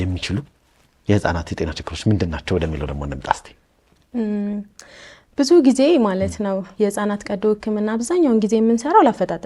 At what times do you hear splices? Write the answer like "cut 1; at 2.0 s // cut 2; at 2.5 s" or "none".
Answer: none